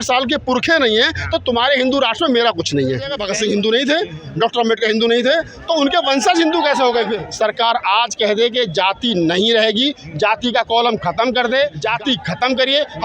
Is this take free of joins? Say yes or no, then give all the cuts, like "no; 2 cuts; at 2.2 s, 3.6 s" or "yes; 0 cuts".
no; 3 cuts; at 3.2 s, 7.2 s, 11.8 s